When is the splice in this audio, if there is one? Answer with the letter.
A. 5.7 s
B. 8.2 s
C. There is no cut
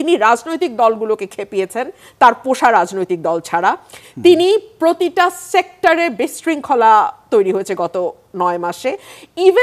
C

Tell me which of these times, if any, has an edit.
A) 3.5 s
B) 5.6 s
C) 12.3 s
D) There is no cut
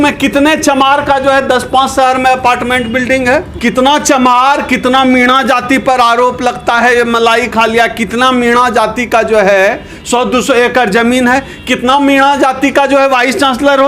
A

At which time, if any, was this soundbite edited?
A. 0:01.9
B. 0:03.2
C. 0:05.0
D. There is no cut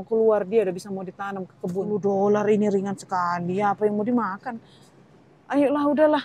A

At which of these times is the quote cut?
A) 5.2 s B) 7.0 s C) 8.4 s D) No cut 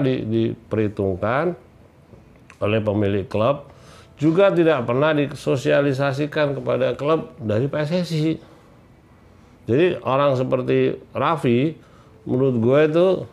B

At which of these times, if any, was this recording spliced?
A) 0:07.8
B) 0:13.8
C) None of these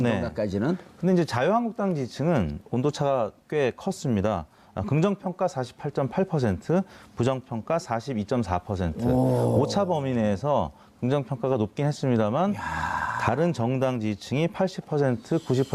A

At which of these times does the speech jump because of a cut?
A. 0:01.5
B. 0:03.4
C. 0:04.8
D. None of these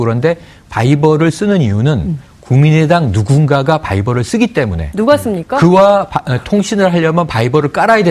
C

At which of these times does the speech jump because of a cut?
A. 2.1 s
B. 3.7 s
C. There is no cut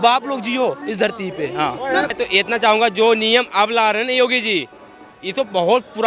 A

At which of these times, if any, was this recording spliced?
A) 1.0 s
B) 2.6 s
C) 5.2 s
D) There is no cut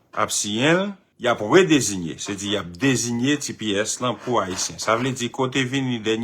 A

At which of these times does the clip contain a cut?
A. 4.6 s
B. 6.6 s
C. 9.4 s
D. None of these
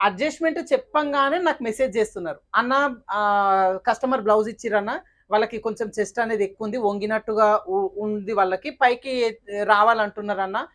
D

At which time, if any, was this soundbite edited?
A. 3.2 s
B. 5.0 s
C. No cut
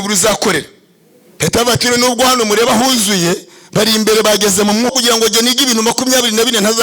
B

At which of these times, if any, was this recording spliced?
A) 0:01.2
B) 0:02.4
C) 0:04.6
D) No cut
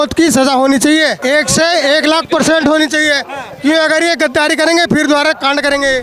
A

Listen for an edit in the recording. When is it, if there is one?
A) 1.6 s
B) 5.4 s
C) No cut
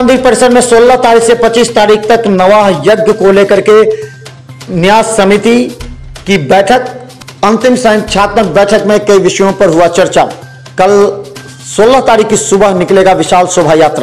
C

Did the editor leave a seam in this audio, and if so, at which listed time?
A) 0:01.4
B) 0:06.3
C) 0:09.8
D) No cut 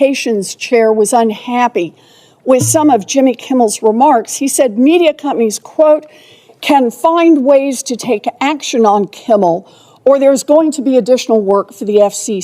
D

